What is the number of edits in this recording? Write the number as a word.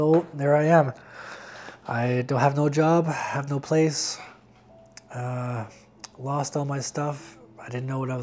one